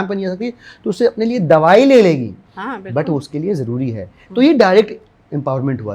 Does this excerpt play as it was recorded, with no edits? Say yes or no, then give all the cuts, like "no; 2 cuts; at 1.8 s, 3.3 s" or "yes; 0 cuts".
yes; 0 cuts